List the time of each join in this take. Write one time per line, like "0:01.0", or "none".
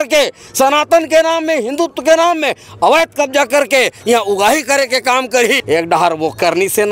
0:05.6